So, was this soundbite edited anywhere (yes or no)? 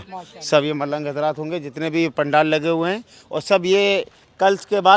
no